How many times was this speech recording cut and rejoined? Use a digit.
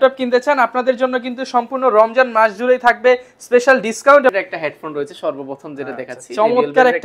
1